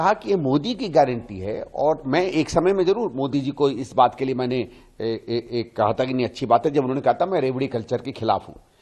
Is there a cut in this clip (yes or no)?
no